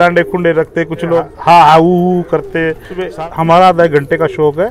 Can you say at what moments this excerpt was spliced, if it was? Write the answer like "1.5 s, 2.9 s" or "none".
1.3 s, 3.0 s